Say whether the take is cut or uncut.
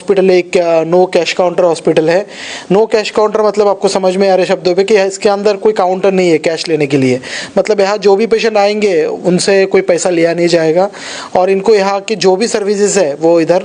uncut